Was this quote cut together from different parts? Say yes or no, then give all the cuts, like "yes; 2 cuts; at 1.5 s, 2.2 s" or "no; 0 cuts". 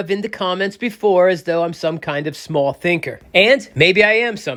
no; 0 cuts